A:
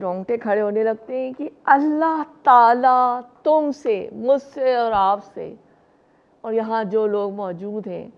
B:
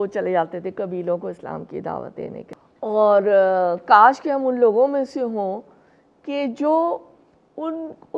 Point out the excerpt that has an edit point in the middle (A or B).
B